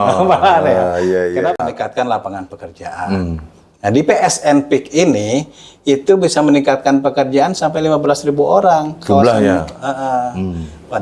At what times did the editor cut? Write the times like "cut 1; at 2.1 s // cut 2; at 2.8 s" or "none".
cut 1; at 1.6 s